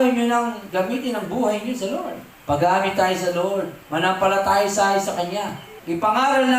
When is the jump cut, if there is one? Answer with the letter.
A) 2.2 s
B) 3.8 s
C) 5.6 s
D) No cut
A